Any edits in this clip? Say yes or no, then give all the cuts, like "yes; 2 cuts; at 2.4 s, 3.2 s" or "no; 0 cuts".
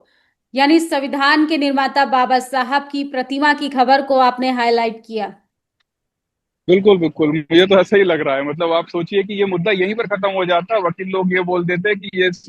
no; 0 cuts